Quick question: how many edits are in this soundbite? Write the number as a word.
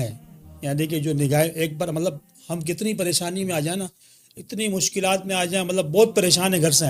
zero